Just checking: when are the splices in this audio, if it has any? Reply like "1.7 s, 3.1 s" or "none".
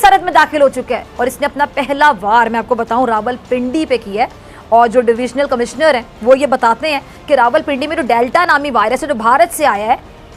1.0 s